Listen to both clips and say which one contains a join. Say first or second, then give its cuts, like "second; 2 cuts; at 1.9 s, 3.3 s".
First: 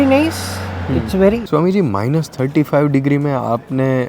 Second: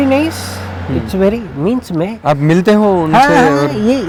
first; 1 cut; at 1.4 s